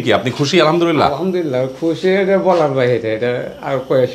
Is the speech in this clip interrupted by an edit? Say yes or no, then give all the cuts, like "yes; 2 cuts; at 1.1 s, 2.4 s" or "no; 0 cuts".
no; 0 cuts